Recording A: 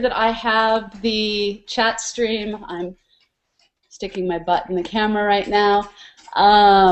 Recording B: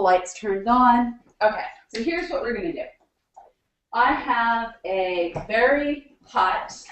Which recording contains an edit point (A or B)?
B